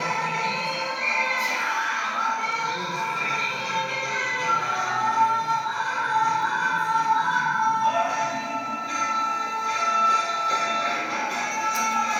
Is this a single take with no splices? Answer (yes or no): yes